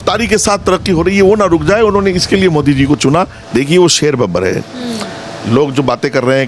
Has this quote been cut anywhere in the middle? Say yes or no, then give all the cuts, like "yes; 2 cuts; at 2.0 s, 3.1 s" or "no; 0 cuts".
yes; 1 cut; at 3.4 s